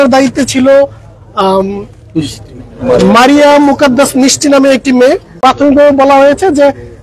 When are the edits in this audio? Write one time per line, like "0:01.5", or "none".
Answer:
0:05.3